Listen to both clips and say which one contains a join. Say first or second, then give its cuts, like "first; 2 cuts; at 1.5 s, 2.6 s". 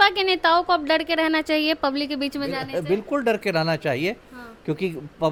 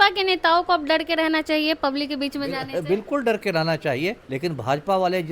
second; 1 cut; at 4.3 s